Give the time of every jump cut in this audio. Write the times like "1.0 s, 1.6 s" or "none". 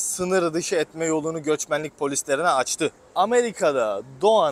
3.0 s